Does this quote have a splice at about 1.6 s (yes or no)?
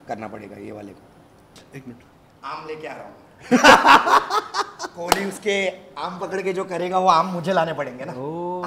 yes